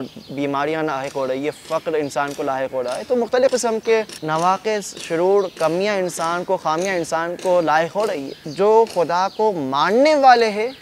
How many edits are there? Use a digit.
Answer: 2